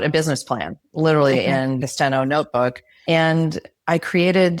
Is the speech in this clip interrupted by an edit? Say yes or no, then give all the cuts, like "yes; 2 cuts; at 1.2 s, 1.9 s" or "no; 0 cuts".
yes; 2 cuts; at 1.8 s, 2.9 s